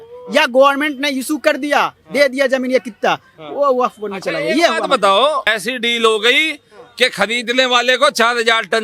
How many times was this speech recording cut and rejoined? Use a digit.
1